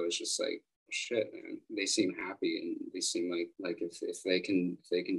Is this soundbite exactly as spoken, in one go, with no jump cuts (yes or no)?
yes